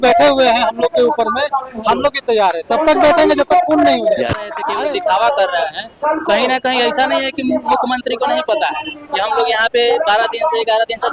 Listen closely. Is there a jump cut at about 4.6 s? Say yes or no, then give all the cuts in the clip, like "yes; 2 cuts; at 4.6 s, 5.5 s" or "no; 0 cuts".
yes; 1 cut; at 4.6 s